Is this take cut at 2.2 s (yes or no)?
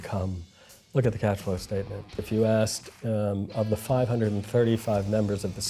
yes